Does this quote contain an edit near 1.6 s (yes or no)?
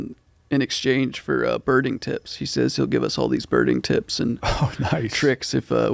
no